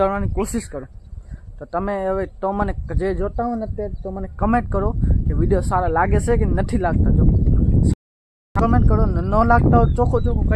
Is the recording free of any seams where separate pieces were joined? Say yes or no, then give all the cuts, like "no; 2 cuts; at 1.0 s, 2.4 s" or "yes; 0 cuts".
yes; 0 cuts